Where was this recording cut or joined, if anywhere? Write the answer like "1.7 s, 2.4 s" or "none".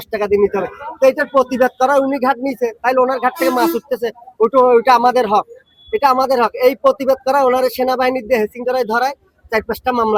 none